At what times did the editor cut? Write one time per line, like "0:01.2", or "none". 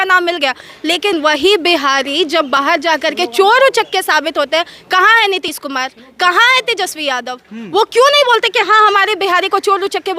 none